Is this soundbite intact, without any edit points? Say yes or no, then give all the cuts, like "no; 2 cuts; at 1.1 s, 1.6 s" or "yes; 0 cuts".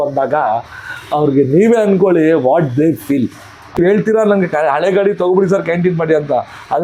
no; 1 cut; at 3.8 s